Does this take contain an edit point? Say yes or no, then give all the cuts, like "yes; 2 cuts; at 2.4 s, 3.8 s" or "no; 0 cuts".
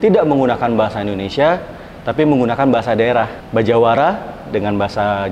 yes; 1 cut; at 3.4 s